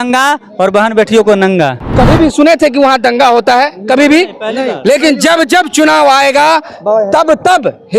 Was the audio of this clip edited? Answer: yes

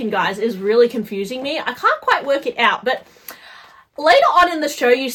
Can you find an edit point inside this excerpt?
no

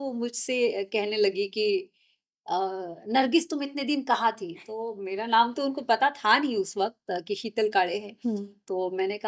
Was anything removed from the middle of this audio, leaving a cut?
no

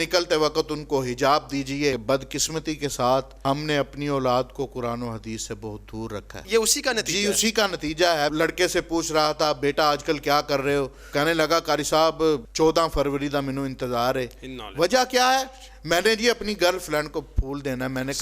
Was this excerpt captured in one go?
no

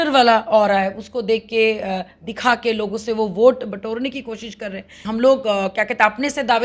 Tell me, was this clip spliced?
yes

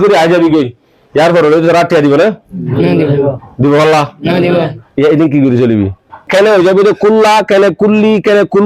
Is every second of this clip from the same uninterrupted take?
no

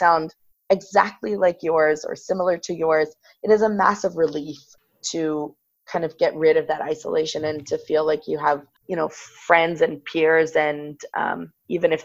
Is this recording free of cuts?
no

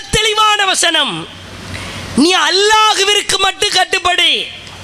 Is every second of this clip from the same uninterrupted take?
yes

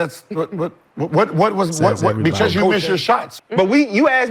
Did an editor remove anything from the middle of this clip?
yes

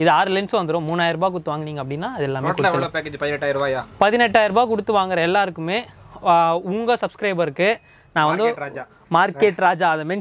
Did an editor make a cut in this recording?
no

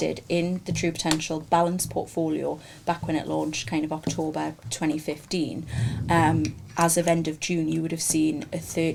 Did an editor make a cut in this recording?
no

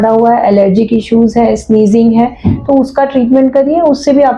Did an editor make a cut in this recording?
no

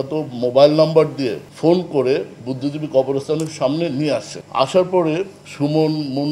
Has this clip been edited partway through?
yes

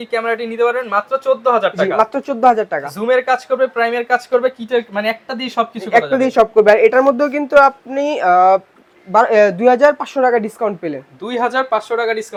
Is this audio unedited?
yes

